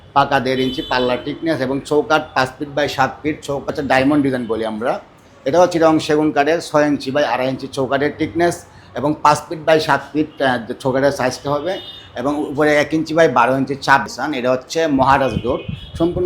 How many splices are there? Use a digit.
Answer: 2